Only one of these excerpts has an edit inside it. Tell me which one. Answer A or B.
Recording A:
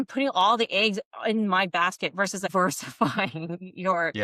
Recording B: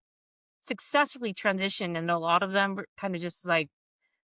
A